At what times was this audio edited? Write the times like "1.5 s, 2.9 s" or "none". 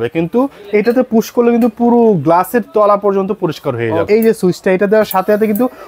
4.0 s